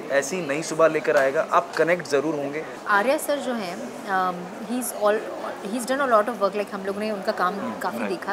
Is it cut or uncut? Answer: cut